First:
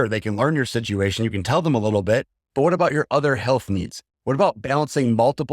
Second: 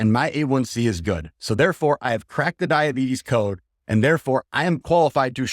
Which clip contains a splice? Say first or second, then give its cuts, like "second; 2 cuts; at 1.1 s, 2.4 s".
second; 1 cut; at 4.5 s